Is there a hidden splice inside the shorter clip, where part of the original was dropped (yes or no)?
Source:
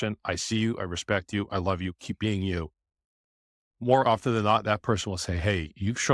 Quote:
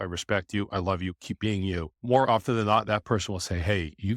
yes